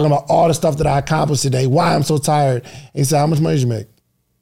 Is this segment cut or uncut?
uncut